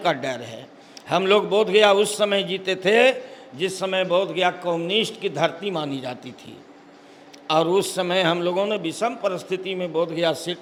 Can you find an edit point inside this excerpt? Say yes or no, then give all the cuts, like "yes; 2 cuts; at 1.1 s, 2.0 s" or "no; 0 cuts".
no; 0 cuts